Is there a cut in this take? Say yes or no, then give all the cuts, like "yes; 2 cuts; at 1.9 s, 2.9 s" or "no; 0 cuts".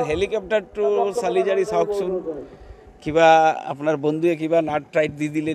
no; 0 cuts